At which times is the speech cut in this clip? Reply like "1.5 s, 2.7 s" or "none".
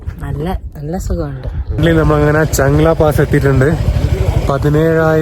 1.8 s